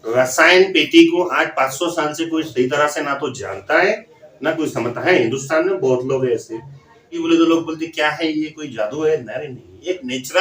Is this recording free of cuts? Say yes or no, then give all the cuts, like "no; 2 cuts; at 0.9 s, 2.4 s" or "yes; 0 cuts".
no; 1 cut; at 7.2 s